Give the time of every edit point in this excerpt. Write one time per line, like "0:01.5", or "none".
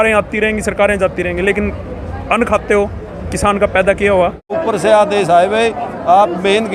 0:04.6